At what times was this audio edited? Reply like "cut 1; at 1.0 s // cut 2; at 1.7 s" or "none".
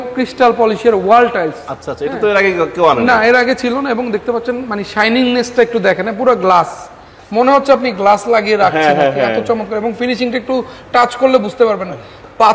none